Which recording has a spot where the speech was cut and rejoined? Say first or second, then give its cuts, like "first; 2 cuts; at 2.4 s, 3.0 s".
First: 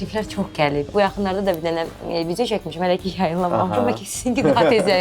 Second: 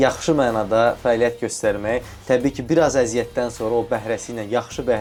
first; 1 cut; at 0.9 s